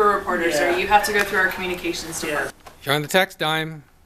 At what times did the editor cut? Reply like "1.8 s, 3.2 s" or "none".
2.7 s